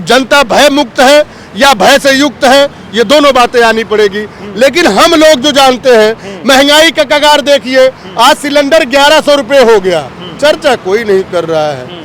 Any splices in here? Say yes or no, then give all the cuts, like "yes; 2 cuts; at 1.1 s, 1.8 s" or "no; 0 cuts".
no; 0 cuts